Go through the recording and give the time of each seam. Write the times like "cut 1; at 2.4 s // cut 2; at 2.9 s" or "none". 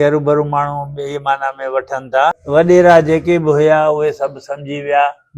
cut 1; at 2.4 s